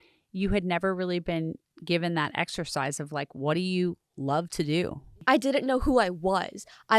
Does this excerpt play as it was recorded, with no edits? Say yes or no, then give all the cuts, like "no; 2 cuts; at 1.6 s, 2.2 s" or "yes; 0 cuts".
no; 2 cuts; at 1.7 s, 5.1 s